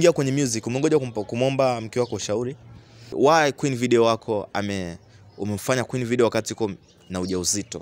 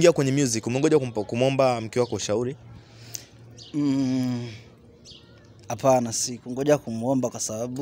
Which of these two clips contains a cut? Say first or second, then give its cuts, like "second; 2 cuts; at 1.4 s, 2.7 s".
first; 1 cut; at 3.1 s